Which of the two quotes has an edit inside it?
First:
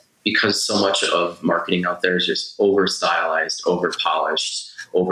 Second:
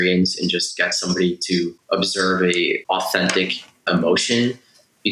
second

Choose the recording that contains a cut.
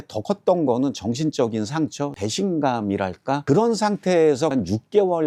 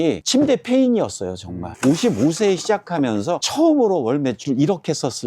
second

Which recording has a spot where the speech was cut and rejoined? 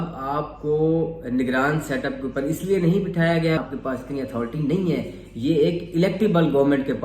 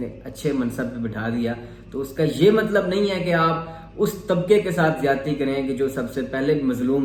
first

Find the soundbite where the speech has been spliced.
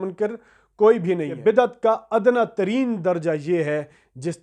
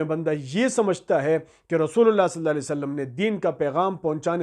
first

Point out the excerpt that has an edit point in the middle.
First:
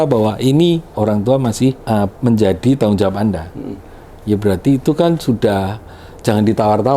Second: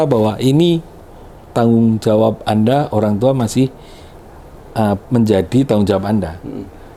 first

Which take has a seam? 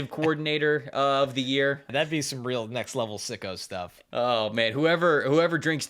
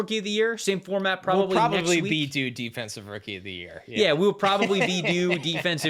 first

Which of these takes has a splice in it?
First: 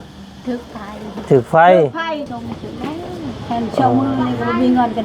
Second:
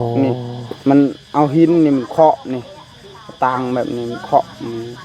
first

